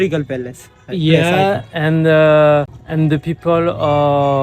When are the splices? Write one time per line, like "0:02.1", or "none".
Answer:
0:02.8

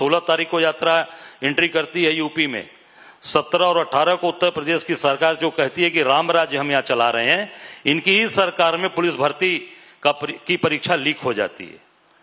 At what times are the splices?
none

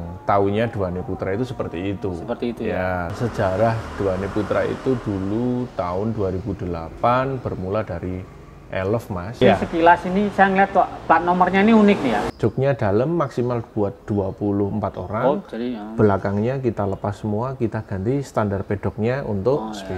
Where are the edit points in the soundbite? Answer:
0:03.1
0:09.4
0:12.2

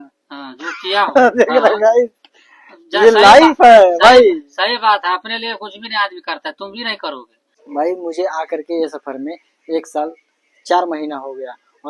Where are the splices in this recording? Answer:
0:07.5

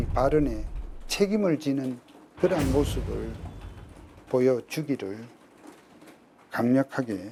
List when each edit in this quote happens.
none

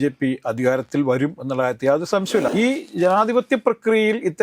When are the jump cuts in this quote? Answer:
0:02.5

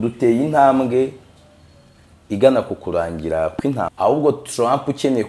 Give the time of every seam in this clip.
0:03.9

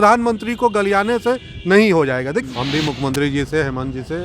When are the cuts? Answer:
0:02.5

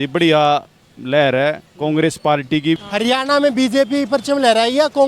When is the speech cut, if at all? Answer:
0:02.8

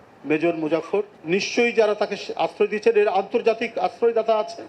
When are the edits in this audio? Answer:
0:01.2

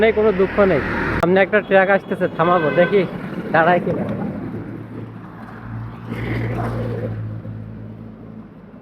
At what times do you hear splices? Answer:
0:01.2

